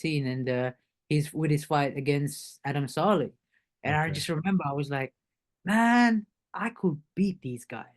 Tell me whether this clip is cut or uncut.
cut